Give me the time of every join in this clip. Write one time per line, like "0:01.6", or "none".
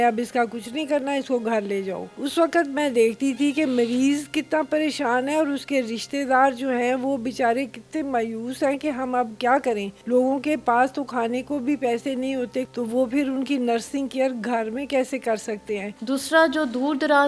0:02.1
0:09.9
0:12.7
0:15.9